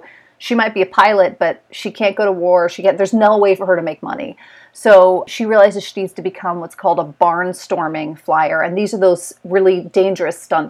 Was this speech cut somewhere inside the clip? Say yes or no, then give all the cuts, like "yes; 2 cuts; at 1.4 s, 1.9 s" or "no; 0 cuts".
yes; 1 cut; at 5.2 s